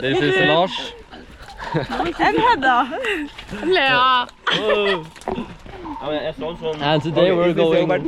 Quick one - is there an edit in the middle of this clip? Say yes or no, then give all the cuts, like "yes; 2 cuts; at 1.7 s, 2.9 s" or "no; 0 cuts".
no; 0 cuts